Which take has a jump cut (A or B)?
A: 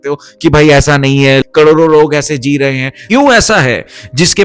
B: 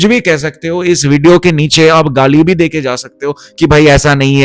A